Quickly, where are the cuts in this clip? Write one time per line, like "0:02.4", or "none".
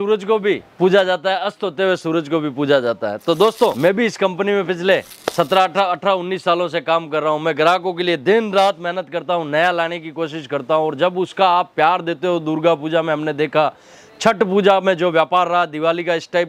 none